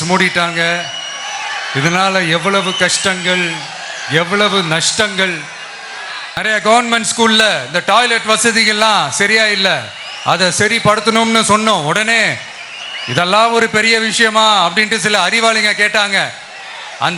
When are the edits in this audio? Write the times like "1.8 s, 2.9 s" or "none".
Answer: 6.4 s